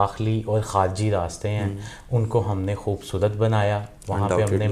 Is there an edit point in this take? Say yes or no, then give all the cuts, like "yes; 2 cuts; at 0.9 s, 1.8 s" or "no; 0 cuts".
no; 0 cuts